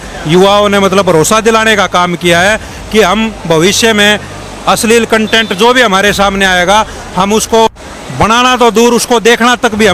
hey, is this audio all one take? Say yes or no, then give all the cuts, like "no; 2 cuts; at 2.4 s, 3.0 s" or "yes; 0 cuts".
yes; 0 cuts